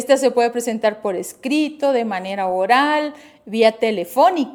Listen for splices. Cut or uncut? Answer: uncut